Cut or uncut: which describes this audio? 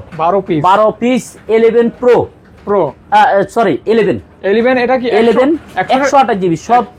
uncut